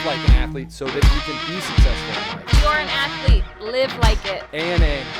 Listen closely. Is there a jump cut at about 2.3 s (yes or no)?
no